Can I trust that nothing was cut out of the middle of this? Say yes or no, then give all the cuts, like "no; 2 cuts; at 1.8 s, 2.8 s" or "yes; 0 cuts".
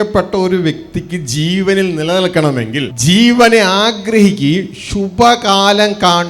no; 1 cut; at 2.9 s